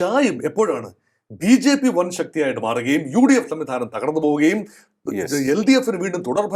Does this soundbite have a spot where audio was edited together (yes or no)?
no